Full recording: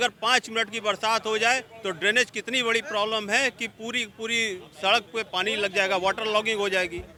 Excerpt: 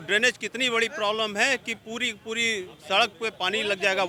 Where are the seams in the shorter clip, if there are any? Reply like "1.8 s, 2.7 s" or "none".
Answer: none